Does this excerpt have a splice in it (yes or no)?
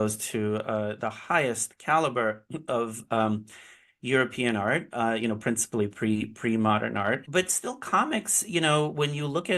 yes